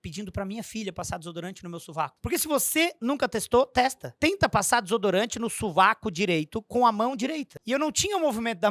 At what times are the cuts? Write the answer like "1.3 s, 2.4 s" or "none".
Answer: 2.2 s, 4.1 s, 7.5 s